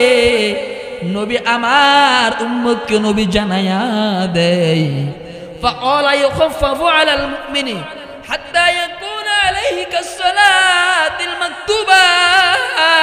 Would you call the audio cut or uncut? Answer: uncut